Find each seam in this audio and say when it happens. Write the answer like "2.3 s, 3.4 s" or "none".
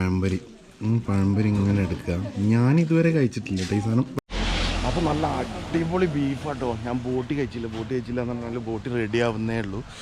4.2 s